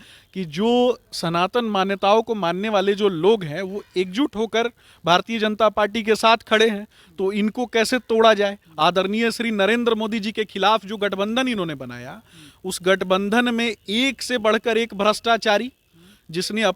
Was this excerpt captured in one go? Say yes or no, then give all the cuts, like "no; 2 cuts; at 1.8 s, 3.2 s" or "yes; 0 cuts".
no; 1 cut; at 8.6 s